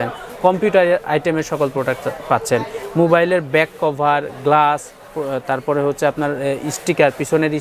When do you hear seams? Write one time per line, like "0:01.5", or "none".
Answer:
none

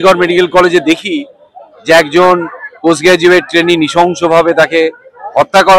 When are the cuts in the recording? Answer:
none

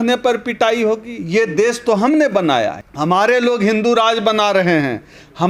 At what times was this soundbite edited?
0:02.8

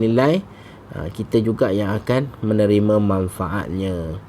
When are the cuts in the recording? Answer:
none

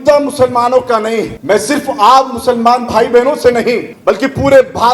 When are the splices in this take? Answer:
0:01.3
0:03.9

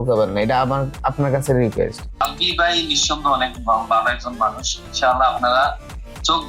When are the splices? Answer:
0:02.2

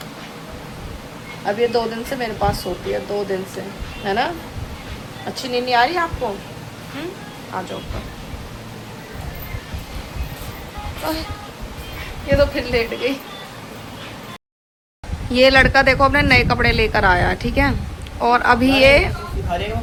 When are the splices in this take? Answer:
none

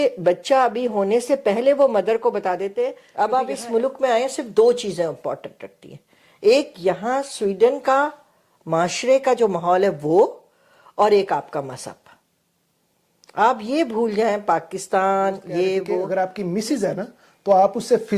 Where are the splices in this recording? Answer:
0:03.0
0:16.1

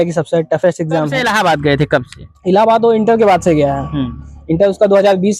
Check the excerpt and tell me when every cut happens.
0:01.1

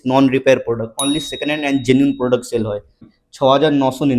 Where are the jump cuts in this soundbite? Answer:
0:03.1

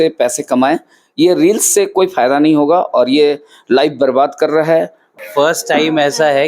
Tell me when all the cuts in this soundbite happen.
0:05.1

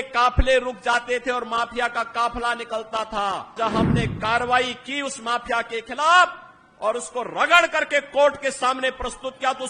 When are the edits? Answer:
0:03.6

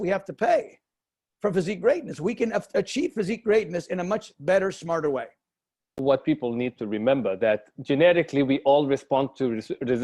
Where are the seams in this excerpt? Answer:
0:06.0

